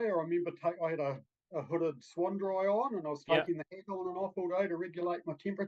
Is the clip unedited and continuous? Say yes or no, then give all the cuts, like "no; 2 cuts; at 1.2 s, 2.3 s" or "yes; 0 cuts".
yes; 0 cuts